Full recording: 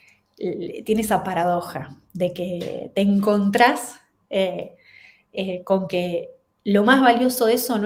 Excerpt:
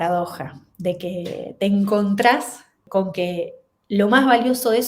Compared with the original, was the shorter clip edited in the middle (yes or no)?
yes